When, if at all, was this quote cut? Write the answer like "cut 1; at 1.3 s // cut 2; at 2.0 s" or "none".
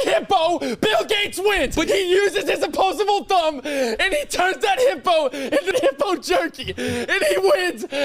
cut 1; at 1.9 s // cut 2; at 5.7 s